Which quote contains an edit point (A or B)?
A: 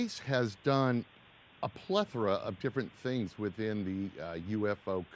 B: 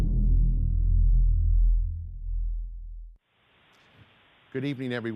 A